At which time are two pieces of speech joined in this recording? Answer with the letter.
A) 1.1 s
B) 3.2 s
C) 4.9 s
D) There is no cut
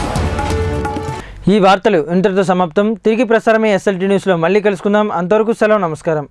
D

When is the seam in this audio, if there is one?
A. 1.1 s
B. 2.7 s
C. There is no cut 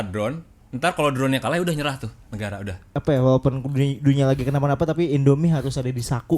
B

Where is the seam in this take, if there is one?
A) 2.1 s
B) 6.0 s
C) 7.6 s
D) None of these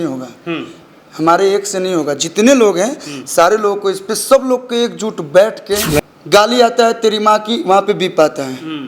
B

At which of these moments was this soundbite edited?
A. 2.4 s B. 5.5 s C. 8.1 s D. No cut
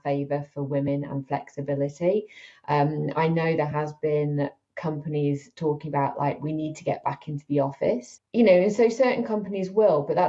C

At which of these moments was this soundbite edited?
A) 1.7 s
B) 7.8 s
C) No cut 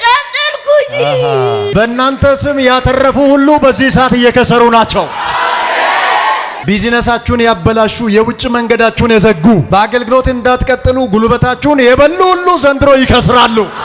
A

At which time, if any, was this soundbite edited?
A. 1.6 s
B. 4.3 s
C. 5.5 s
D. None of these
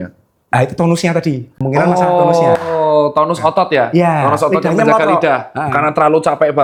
D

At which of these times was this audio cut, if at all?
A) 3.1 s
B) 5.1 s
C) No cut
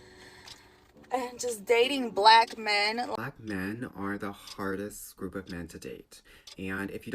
A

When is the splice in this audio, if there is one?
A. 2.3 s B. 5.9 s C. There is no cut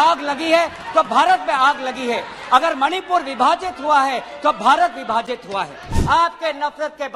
B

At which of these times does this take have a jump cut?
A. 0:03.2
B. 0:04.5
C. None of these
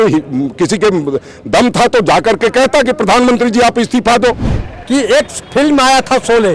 B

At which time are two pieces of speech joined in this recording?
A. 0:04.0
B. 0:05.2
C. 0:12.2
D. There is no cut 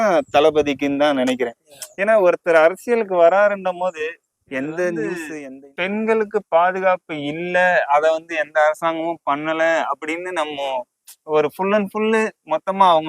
B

